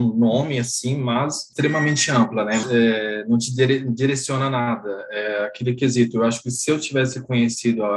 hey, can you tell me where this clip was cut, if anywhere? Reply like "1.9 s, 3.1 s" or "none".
1.4 s, 2.6 s